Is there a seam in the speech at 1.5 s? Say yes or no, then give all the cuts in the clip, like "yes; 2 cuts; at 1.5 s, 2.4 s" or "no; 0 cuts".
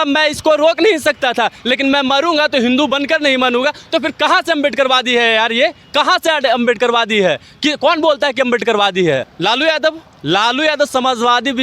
no; 1 cut; at 9.3 s